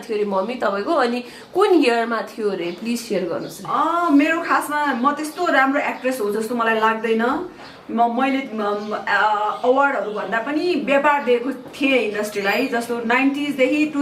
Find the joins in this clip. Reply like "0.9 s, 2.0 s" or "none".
none